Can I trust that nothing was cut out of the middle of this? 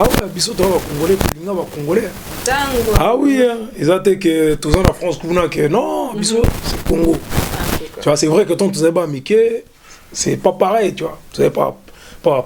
yes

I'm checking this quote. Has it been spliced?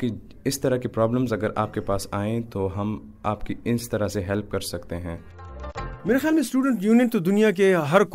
yes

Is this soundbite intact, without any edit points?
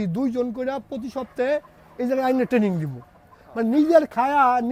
yes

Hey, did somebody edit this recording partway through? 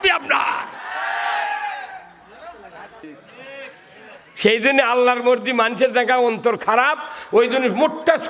yes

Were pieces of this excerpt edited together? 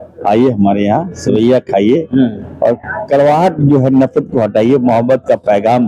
no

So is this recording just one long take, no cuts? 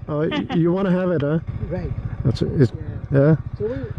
no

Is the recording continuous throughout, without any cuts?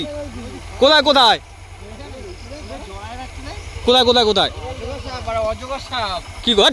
yes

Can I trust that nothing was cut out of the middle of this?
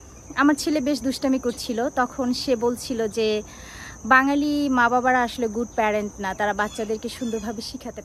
yes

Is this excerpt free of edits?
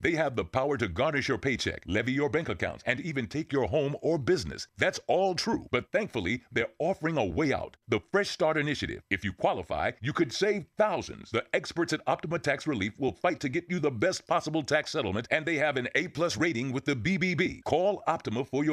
yes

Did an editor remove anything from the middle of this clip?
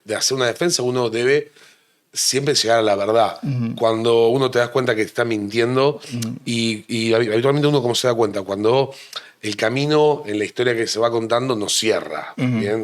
no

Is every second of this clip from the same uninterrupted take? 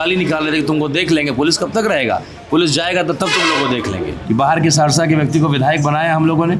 no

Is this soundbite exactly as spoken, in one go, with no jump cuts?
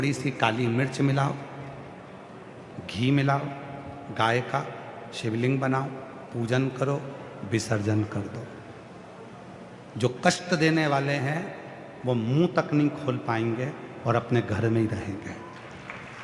yes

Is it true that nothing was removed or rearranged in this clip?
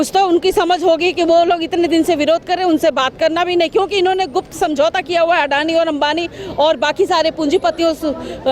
yes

